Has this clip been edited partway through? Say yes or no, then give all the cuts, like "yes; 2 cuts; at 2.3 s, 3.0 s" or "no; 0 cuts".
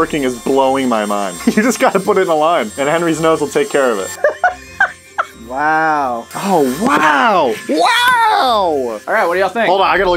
no; 0 cuts